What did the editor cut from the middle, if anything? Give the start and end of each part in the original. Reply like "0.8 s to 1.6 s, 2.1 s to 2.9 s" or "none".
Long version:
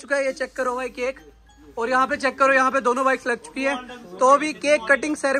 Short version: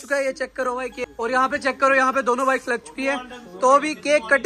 1.0 s to 1.6 s